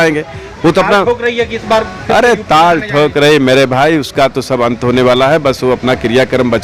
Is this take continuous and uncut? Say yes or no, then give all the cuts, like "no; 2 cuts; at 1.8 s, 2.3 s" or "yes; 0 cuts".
yes; 0 cuts